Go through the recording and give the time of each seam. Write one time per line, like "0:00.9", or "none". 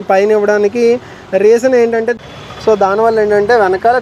0:02.1

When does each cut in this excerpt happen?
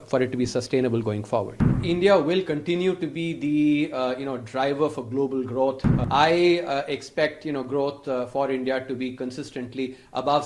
0:01.8
0:05.9

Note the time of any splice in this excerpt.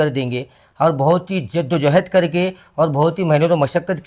none

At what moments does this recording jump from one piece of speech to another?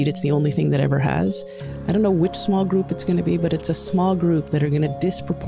0:01.7

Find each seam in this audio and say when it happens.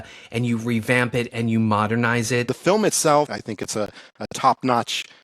0:02.5
0:03.4

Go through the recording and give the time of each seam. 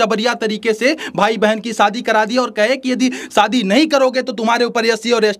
none

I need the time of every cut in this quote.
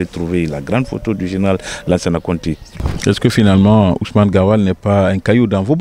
0:02.7

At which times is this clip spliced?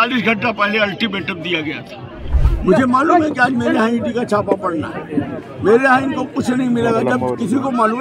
0:02.4

